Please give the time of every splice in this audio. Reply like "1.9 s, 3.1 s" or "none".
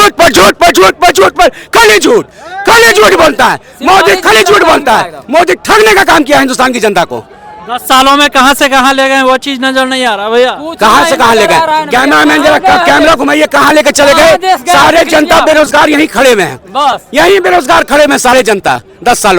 none